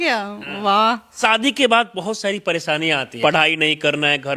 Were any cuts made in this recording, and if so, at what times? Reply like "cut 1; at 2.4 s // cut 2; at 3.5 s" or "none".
cut 1; at 1.2 s // cut 2; at 3.1 s

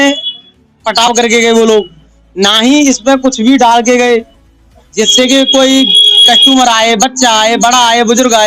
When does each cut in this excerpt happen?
none

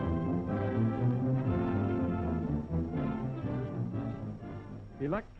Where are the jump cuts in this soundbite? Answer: cut 1; at 0.9 s

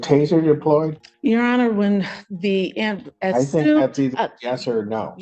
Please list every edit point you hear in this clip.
cut 1; at 1.0 s

